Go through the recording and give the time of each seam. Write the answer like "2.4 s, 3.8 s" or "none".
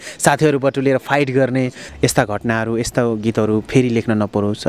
1.8 s